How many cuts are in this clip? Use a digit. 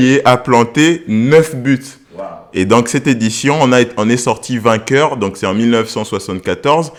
0